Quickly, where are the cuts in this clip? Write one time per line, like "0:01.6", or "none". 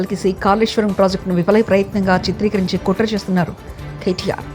none